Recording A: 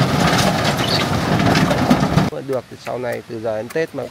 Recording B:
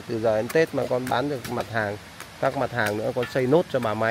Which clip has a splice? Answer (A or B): A